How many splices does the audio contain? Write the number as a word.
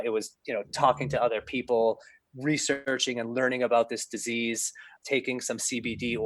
two